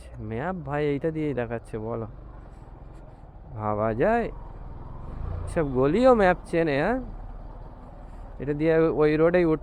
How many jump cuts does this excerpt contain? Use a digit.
0